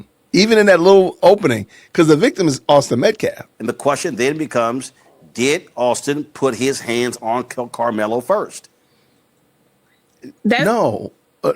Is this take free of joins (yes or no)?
no